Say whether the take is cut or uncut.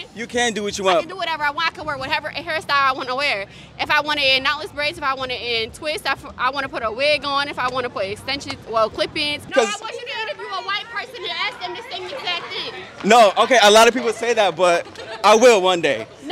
cut